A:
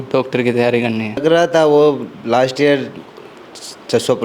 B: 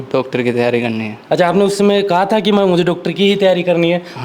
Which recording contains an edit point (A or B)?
A